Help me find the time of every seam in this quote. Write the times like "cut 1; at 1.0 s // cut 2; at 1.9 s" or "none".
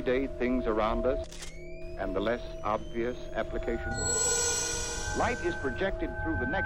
none